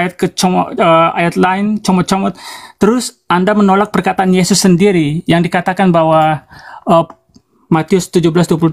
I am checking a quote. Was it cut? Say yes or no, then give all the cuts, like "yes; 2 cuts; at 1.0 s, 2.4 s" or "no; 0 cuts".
no; 0 cuts